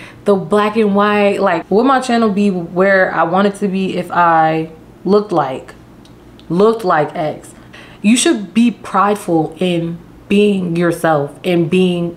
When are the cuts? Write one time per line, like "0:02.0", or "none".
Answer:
0:01.6
0:07.6